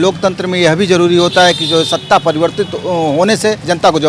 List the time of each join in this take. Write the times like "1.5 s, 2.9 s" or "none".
none